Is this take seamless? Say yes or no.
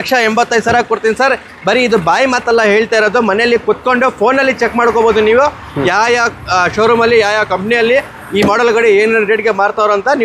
yes